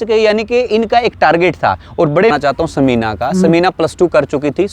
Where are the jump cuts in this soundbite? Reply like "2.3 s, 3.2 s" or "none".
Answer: 2.3 s